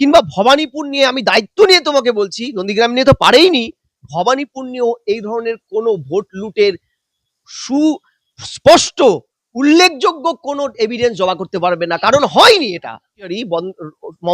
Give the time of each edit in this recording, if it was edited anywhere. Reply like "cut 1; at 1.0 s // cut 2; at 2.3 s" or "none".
cut 1; at 13.3 s